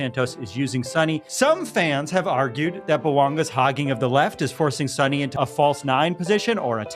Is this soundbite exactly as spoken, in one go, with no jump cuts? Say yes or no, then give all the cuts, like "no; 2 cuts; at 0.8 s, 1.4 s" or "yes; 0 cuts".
no; 2 cuts; at 1.3 s, 5.3 s